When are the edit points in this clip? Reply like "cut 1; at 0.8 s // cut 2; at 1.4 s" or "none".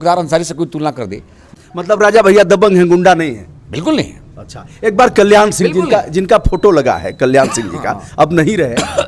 cut 1; at 1.5 s